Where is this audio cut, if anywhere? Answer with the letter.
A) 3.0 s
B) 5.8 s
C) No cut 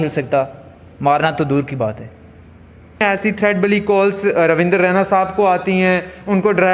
A